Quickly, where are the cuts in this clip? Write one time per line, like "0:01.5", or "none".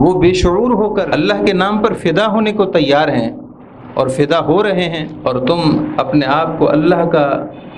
0:01.1
0:05.1